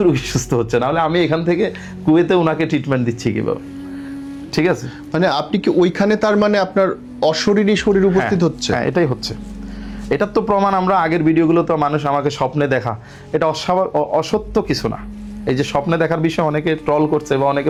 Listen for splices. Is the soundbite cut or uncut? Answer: uncut